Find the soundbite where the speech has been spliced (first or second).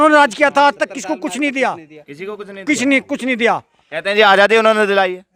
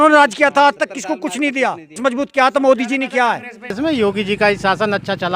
second